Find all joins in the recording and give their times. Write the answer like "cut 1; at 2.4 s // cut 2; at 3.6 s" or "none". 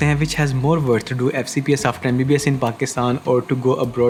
none